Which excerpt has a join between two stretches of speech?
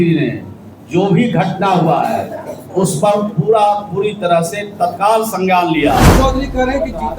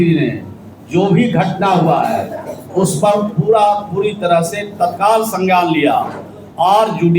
first; 1 cut; at 6.1 s

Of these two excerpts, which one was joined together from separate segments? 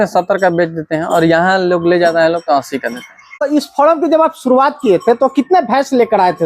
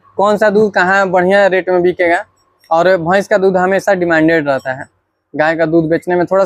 first; 1 cut; at 3.2 s

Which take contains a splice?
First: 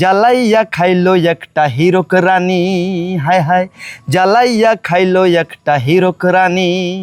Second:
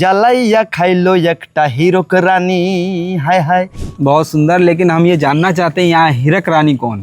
second; 1 cut; at 3.8 s

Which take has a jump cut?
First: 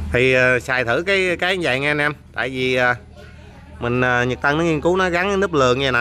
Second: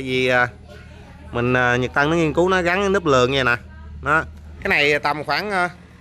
second; 1 cut; at 4.5 s

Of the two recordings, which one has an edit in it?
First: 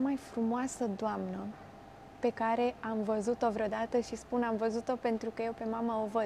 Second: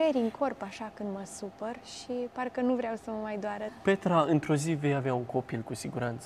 second; 1 cut; at 3.7 s

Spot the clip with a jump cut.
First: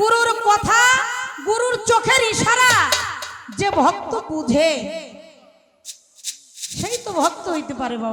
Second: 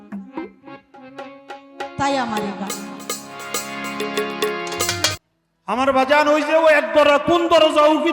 second; 1 cut; at 5.1 s

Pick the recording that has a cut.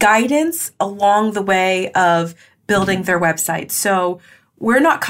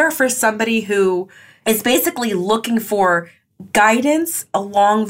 second; 1 cut; at 1.7 s

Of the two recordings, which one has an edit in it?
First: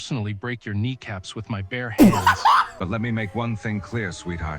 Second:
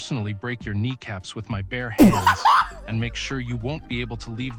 first; 1 cut; at 2.7 s

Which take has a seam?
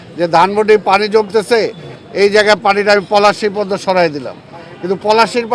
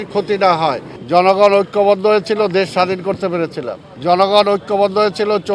second; 2 cuts; at 0.9 s, 3.8 s

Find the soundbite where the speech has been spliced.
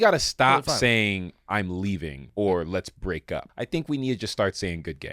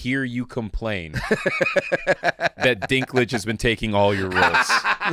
first; 2 cuts; at 2.2 s, 3.5 s

